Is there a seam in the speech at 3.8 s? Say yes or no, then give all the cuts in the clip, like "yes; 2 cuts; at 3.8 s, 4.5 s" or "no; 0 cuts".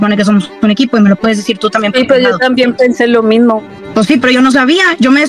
yes; 1 cut; at 3.8 s